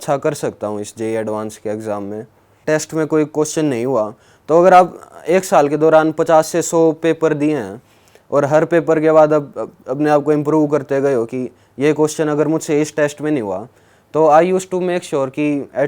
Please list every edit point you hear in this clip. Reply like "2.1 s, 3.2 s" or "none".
2.6 s